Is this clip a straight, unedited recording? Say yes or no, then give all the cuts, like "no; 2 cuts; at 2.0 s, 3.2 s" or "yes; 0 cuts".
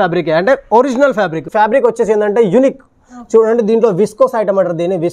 no; 1 cut; at 1.4 s